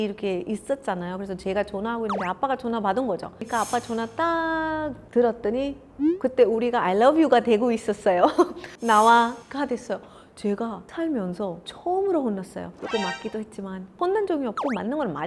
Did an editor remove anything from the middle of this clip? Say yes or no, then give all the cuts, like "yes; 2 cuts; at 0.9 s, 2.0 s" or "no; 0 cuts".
yes; 3 cuts; at 3.4 s, 8.6 s, 14.0 s